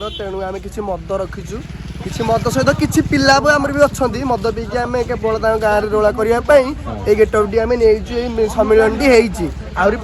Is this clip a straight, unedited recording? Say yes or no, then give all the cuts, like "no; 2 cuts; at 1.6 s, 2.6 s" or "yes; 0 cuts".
yes; 0 cuts